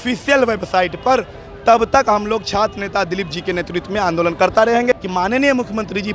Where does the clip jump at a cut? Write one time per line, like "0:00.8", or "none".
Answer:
0:05.0